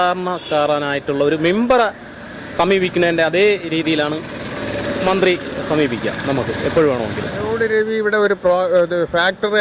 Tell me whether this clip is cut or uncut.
cut